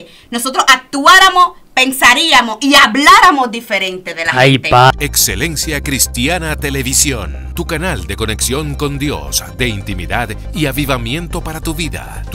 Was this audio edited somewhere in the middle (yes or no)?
yes